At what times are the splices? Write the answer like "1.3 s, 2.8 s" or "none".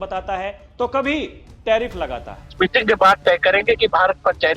2.5 s

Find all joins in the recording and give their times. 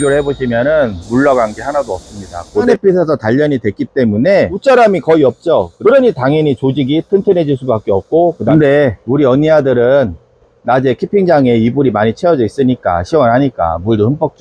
2.7 s, 8.4 s

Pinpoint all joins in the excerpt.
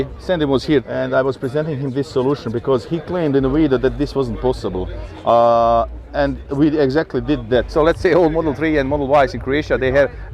0.9 s, 7.7 s

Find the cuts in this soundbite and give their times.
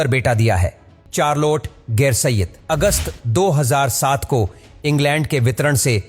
0.9 s

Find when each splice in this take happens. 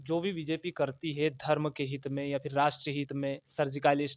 none

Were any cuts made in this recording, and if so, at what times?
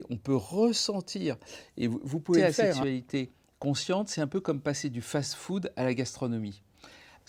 2.8 s

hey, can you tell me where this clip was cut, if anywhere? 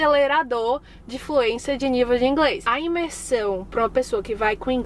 2.6 s

